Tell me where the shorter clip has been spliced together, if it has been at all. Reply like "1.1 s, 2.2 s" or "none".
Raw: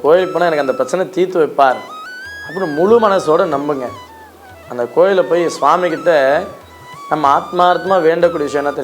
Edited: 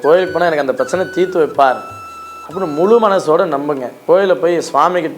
4.0 s